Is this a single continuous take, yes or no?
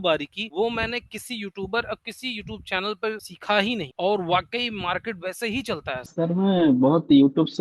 no